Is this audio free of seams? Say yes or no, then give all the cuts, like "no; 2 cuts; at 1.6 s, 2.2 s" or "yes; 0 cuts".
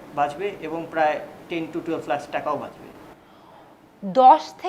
yes; 0 cuts